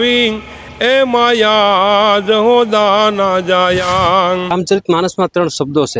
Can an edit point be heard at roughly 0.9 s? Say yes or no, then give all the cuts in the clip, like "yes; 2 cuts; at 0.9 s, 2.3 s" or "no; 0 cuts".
no; 1 cut; at 4.5 s